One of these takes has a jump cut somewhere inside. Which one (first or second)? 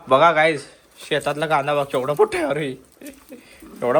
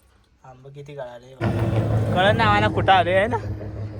second